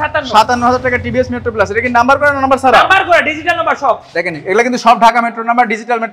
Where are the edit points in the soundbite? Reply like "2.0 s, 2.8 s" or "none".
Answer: none